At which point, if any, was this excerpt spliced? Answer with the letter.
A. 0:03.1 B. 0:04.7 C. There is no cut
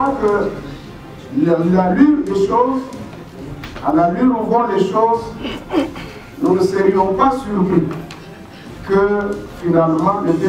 C